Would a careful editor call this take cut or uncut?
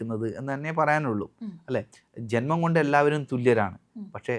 uncut